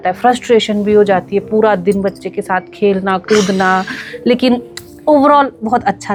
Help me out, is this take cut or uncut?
uncut